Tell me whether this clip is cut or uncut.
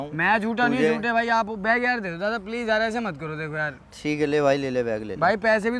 uncut